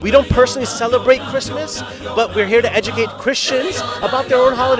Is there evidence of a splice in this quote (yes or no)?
no